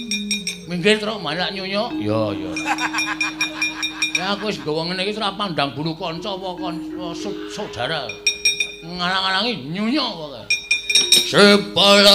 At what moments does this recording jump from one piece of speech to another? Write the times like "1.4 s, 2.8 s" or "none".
10.9 s